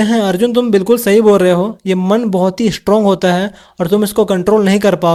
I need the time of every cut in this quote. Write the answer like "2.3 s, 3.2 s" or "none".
none